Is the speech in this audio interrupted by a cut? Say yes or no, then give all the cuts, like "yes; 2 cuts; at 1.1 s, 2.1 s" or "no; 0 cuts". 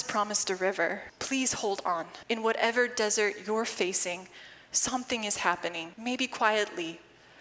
yes; 3 cuts; at 1.1 s, 2.1 s, 5.9 s